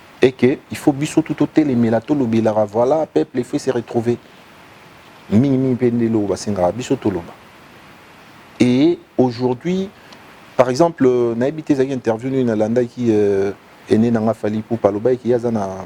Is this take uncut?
yes; 0 cuts

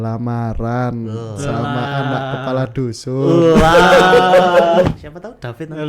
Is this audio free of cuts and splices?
no; 1 cut; at 4.9 s

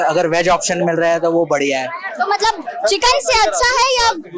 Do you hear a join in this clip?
no; 0 cuts

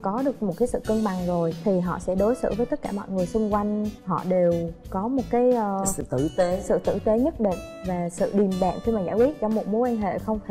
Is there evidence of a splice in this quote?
no; 0 cuts

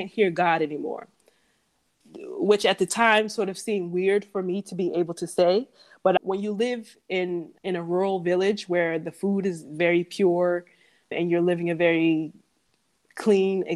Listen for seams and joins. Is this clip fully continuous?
yes; 0 cuts

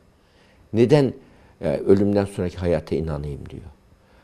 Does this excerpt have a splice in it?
no; 0 cuts

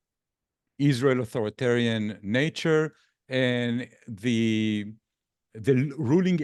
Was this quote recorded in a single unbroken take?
yes; 0 cuts

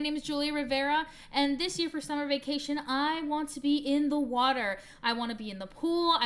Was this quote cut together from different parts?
no; 0 cuts

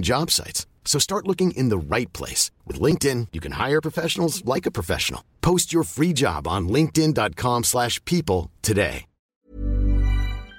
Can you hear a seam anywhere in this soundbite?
yes; 1 cut; at 9.3 s

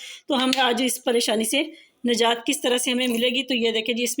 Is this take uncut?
yes; 0 cuts

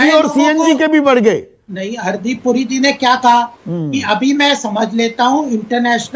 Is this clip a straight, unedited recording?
yes; 0 cuts

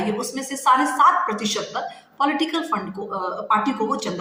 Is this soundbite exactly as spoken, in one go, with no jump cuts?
yes; 0 cuts

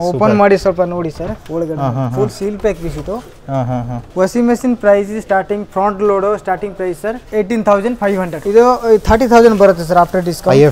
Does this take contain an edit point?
yes; 3 cuts; at 4.0 s, 7.2 s, 8.3 s

